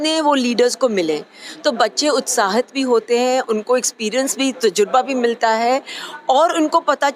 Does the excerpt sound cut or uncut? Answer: uncut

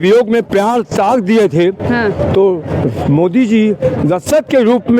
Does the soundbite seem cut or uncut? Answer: uncut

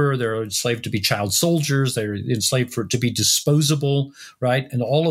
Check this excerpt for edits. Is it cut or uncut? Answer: uncut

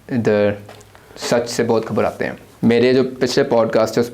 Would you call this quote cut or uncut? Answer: cut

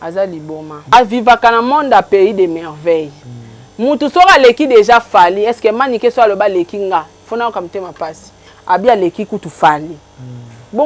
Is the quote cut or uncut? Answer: cut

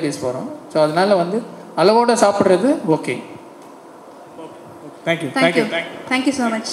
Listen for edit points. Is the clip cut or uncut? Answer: uncut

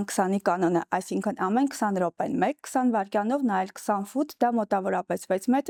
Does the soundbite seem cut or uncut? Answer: uncut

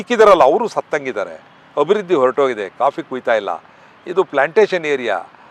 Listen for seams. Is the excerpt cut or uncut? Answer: uncut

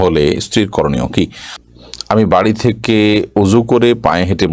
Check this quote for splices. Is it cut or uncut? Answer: cut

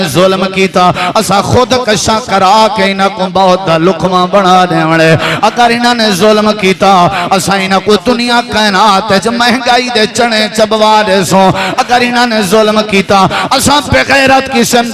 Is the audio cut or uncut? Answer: uncut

